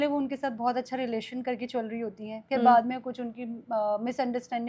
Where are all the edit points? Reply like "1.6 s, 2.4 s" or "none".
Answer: none